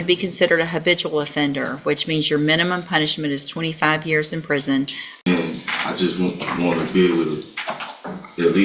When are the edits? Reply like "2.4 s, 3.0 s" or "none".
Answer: 5.0 s